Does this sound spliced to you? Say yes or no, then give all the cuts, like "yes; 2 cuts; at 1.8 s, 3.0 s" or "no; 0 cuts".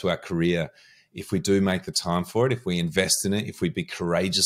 no; 0 cuts